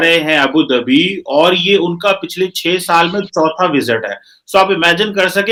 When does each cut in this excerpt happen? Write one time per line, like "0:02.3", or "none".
none